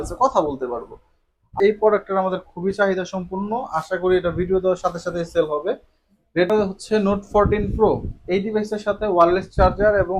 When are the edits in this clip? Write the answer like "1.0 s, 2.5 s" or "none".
1.6 s, 6.5 s